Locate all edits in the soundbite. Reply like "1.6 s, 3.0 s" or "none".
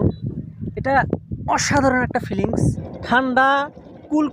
2.9 s